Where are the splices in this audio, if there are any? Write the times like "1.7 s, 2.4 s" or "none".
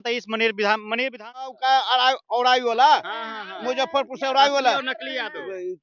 1.5 s